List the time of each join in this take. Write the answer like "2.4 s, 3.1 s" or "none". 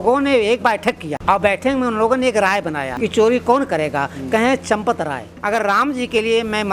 1.1 s, 2.9 s, 5.3 s

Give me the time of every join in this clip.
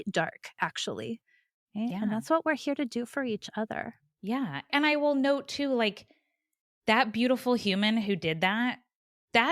1.6 s

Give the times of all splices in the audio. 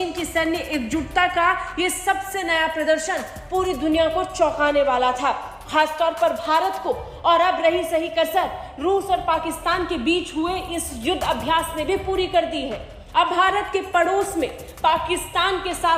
none

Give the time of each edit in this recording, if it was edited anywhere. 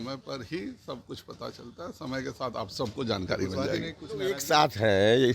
4.4 s

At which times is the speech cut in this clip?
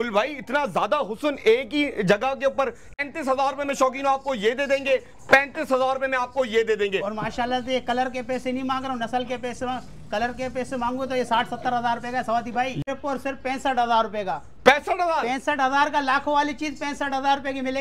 3.0 s, 12.8 s

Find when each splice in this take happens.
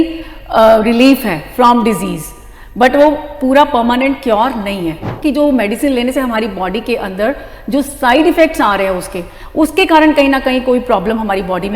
5.2 s

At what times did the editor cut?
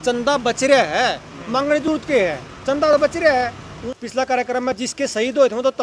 3.8 s

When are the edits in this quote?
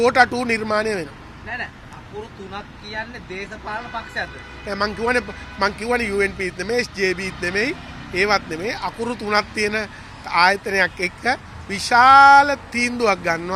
none

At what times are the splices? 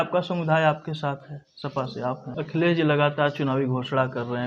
2.3 s

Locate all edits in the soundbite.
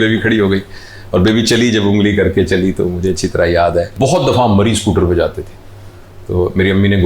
3.9 s

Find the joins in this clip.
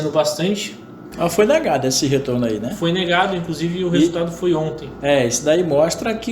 1.1 s

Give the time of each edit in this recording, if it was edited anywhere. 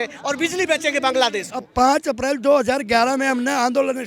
1.7 s

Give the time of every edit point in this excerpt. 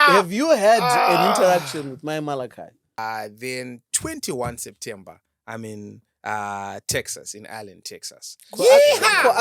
2.8 s

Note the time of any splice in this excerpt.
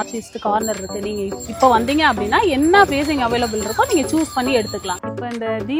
1.4 s, 4.9 s

